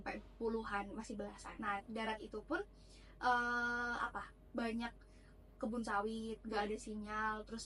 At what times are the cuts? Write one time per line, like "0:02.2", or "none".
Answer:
0:01.5